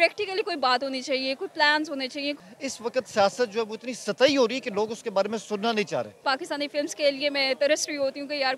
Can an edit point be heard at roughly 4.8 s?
no; 2 cuts; at 2.5 s, 6.2 s

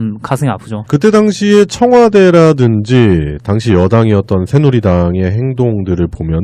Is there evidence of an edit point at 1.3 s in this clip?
no; 0 cuts

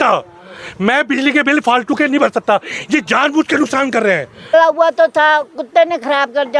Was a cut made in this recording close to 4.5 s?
yes; 1 cut; at 4.5 s

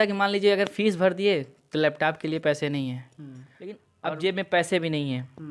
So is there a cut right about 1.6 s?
no; 1 cut; at 3.8 s

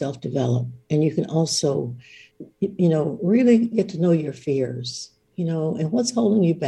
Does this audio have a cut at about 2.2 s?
yes; 1 cut; at 2.2 s

